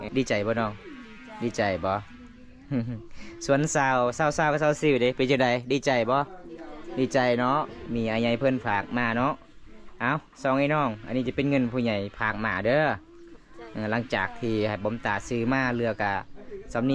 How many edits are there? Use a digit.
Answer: 0